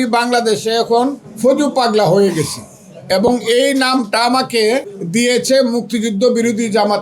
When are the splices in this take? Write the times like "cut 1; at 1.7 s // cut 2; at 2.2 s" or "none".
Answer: cut 1; at 1.3 s // cut 2; at 5.0 s